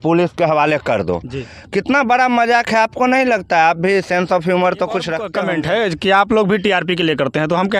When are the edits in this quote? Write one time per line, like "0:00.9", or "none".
0:05.3